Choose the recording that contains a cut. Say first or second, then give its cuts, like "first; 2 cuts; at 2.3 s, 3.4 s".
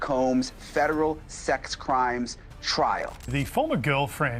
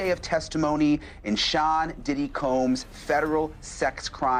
first; 1 cut; at 3.2 s